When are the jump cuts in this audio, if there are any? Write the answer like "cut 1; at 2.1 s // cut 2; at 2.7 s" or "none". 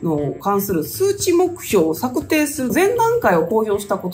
cut 1; at 2.7 s